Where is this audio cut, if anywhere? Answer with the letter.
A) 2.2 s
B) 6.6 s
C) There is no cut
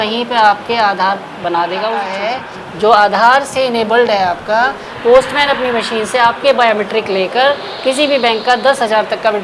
A